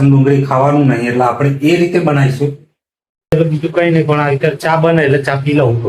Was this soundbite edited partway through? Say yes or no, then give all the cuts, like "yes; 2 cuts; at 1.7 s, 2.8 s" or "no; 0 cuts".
yes; 1 cut; at 3.3 s